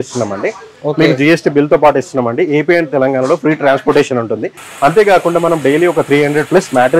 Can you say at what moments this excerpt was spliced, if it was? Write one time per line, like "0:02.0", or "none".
none